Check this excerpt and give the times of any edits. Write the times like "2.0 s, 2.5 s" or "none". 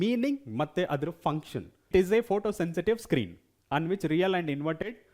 1.8 s